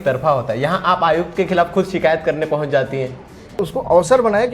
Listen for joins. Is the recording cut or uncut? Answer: cut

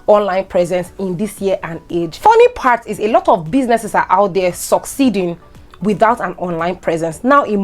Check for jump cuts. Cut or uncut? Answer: cut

